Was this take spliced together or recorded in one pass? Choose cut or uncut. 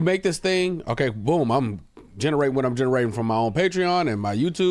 uncut